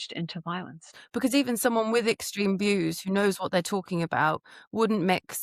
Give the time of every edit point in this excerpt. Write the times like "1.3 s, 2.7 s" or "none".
1.0 s